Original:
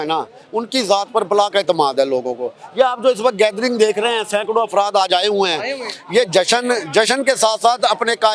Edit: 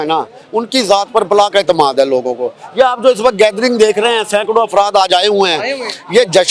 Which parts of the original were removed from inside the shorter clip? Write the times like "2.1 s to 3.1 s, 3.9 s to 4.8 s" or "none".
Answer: none